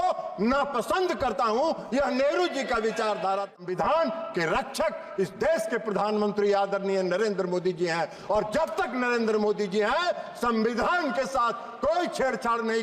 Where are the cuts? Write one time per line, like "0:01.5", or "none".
0:03.5

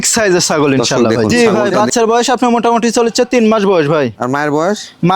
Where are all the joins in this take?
0:01.3

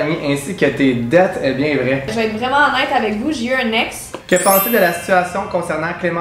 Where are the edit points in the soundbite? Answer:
0:02.1
0:04.2

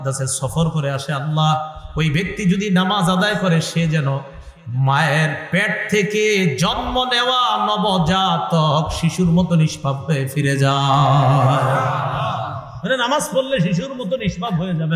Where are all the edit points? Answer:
none

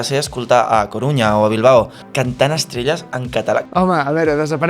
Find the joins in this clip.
0:02.0
0:03.6

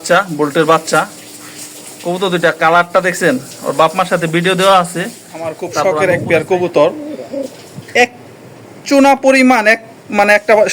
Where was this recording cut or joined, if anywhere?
0:05.7

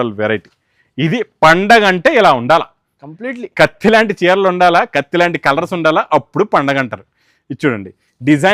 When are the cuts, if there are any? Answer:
none

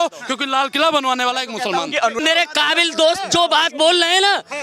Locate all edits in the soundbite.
0:02.2

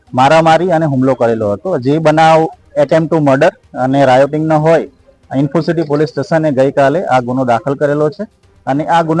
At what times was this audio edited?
none

